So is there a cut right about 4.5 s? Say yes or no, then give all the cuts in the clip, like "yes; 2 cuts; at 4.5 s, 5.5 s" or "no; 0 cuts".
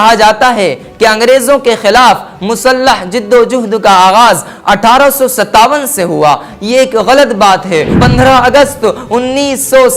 no; 1 cut; at 7.9 s